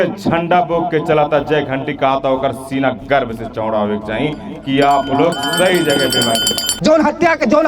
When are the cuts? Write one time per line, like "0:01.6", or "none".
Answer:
0:06.7